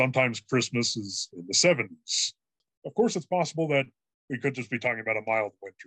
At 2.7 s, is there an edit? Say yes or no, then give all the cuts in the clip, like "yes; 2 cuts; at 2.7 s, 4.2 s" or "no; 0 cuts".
yes; 1 cut; at 2.7 s